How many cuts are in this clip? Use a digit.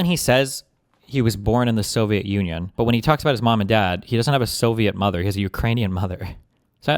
2